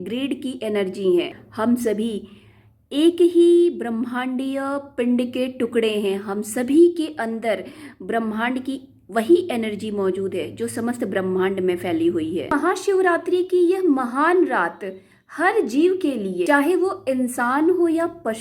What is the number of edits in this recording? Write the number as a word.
three